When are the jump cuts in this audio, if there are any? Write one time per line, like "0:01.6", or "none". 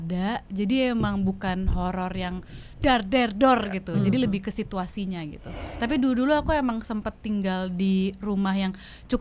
0:05.7